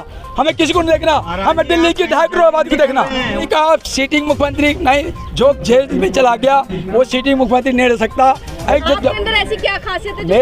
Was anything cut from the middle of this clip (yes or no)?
yes